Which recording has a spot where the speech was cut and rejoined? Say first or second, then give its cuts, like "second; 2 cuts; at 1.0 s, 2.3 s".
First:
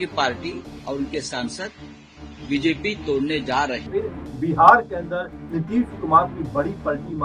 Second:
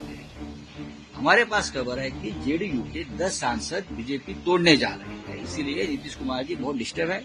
first; 1 cut; at 3.9 s